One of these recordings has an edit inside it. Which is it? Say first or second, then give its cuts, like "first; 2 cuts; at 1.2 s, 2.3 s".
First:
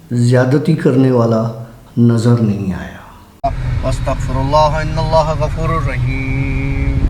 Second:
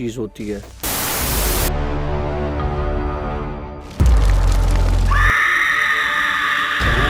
first; 1 cut; at 3.2 s